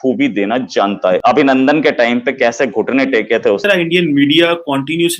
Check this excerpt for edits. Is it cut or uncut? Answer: cut